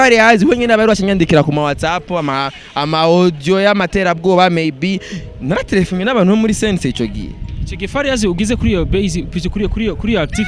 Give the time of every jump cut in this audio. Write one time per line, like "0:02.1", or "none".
none